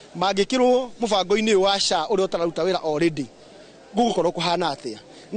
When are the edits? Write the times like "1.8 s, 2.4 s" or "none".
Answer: none